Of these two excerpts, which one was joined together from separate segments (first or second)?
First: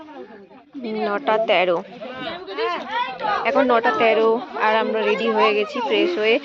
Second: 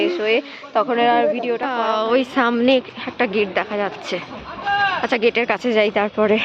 second